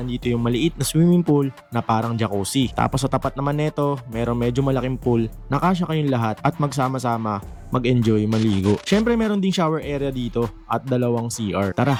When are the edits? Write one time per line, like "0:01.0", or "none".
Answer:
none